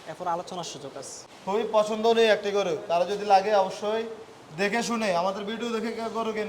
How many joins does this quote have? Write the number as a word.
one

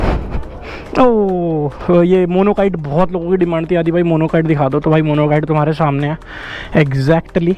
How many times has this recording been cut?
one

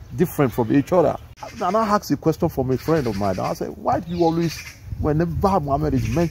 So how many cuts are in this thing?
one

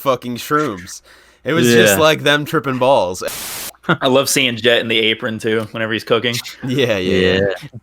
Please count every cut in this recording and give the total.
one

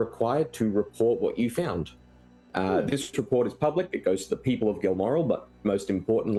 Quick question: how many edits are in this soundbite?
zero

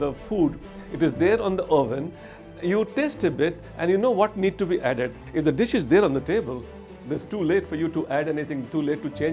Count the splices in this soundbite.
one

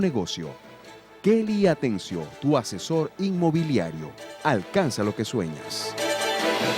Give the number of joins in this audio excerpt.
one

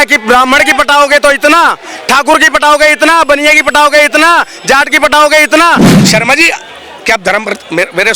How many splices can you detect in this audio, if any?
one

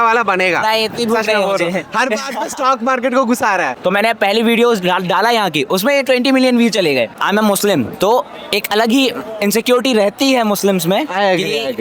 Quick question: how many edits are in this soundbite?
two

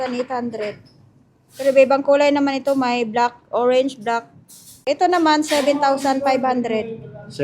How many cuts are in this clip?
one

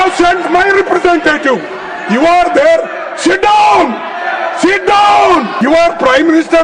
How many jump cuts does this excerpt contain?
one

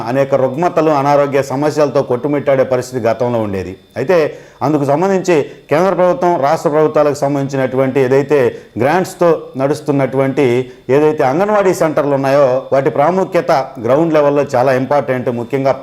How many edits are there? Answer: zero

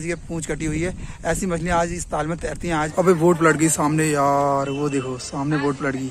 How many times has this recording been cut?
one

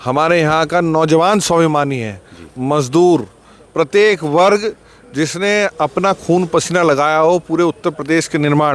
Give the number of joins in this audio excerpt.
zero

